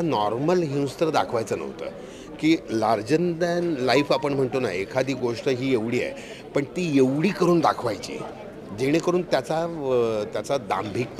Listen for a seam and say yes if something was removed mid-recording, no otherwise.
no